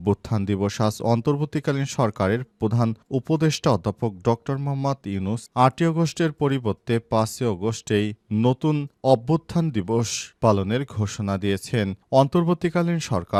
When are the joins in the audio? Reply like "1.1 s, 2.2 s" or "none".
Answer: none